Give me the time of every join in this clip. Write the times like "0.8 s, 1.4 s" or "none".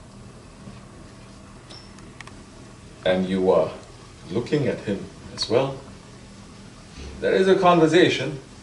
none